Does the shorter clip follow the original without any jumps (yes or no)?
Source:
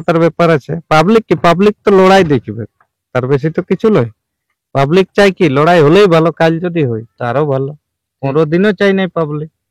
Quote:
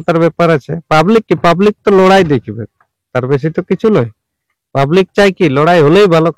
yes